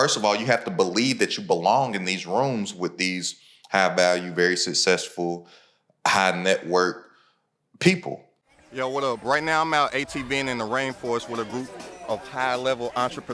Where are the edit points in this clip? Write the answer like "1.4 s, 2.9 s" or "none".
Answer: 8.6 s